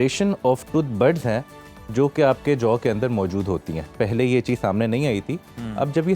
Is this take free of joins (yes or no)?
yes